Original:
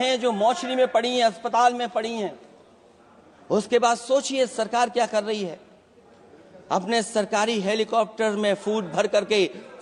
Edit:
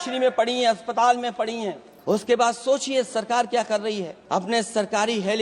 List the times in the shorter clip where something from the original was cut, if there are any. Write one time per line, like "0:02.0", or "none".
0:01.9
0:04.1